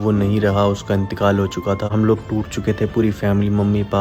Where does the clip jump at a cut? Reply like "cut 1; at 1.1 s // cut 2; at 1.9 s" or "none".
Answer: cut 1; at 1.9 s